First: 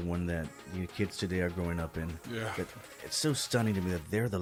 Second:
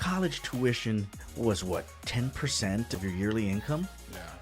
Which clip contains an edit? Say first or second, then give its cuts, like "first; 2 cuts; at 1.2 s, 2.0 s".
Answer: second; 2 cuts; at 1.2 s, 2.9 s